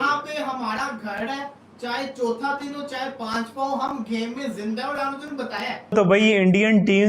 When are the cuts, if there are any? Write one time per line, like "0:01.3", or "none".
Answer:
0:06.0